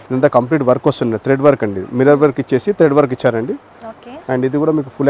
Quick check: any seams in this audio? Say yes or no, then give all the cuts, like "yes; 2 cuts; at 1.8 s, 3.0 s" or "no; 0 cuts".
no; 0 cuts